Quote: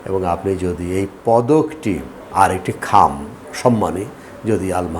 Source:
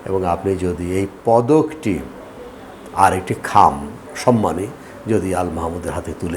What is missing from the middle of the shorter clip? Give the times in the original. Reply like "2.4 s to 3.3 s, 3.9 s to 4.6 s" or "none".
2.1 s to 2.8 s

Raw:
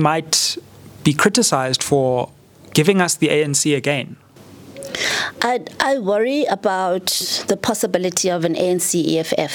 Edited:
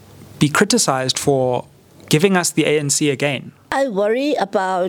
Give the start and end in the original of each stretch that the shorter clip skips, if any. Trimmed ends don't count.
4.3 s to 5.7 s

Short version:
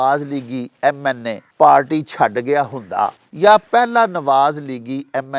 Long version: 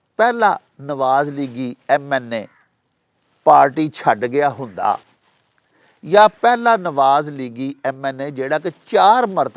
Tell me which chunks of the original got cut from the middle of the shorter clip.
2.4 s to 3.2 s, 5.1 s to 5.9 s

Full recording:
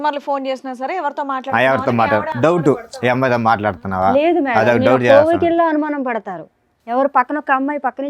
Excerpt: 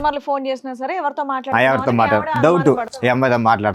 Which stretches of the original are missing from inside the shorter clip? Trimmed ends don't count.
none

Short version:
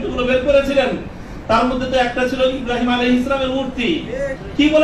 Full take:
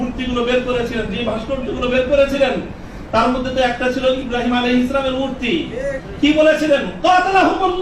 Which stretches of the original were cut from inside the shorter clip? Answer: none

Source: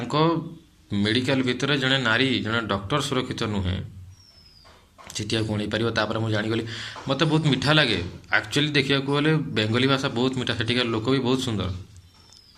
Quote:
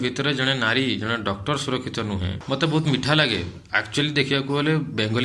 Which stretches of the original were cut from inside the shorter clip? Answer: 3.8 s to 6.9 s

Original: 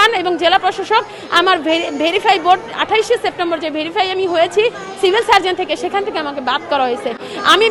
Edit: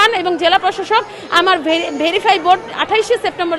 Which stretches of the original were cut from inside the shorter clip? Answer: none

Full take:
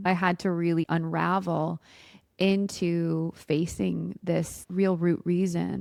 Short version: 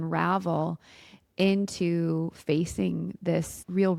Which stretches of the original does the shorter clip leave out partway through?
none

